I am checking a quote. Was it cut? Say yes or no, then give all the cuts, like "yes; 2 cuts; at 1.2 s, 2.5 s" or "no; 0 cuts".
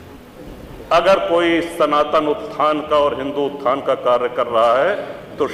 no; 0 cuts